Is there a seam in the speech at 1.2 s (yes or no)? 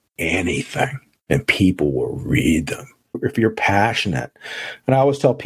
no